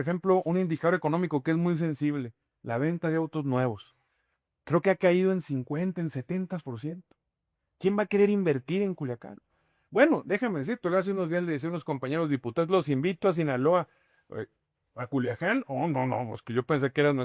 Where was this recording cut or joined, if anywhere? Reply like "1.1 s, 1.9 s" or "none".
none